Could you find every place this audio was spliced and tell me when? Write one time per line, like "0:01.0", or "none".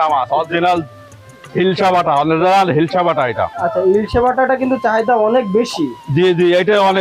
none